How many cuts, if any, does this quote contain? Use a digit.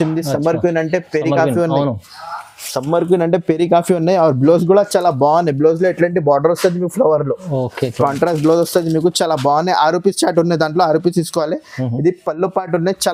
0